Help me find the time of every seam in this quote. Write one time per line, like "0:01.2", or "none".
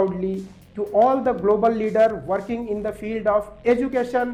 none

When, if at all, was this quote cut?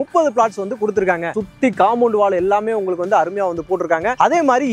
none

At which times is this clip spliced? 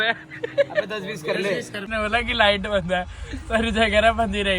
0:01.9

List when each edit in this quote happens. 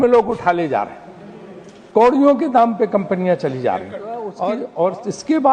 0:04.3

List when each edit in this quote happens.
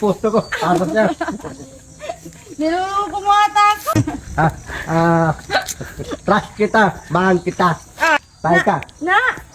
0:03.8
0:08.2

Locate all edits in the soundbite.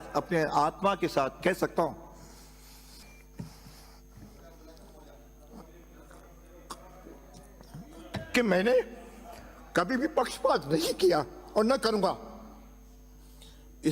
0:03.0

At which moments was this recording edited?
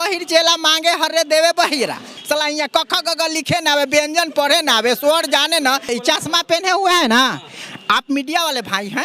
0:02.1
0:05.9

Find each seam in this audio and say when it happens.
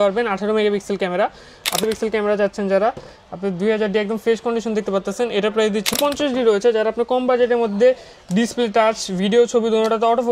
0:01.8
0:05.9

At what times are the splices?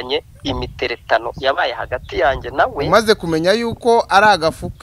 none

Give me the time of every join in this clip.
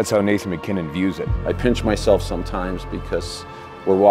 0:01.3

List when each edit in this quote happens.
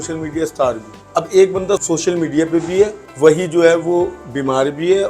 0:00.9
0:01.8
0:03.0

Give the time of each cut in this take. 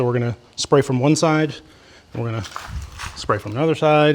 none

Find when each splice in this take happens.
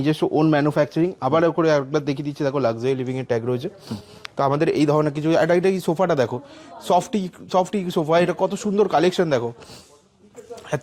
none

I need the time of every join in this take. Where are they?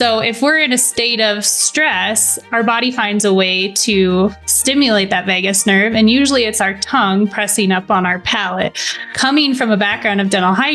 0:09.0

